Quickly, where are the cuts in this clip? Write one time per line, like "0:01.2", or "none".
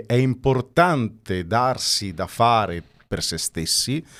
none